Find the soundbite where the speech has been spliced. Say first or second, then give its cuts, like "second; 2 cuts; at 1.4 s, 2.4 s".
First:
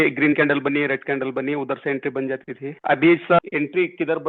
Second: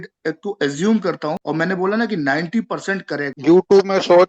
second; 2 cuts; at 1.4 s, 3.4 s